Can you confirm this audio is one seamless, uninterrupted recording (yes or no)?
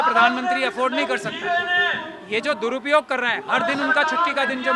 yes